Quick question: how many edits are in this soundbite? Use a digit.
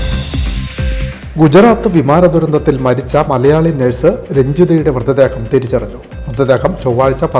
1